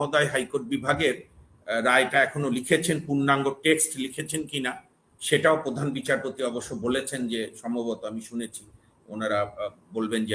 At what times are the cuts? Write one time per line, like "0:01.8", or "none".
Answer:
none